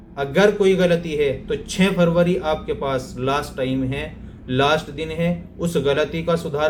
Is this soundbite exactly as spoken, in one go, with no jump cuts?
yes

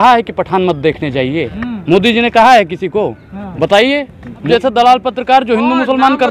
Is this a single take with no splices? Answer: no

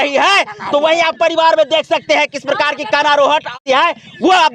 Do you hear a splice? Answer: yes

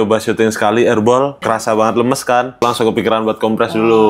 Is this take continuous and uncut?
no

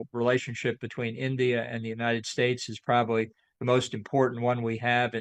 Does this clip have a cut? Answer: no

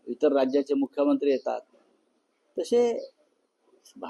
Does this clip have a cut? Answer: no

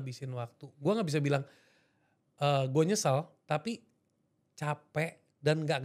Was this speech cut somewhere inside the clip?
no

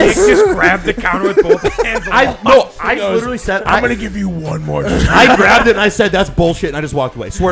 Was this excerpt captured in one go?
yes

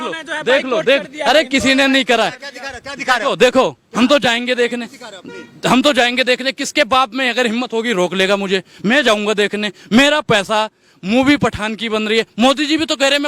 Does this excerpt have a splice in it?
no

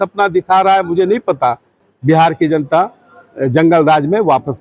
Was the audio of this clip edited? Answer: yes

